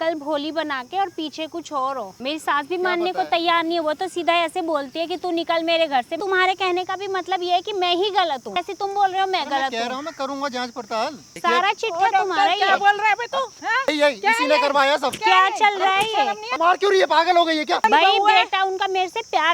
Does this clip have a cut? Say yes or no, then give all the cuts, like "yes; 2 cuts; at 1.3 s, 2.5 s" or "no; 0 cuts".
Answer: yes; 7 cuts; at 2.1 s, 6.2 s, 8.7 s, 11.3 s, 13.9 s, 16.6 s, 17.8 s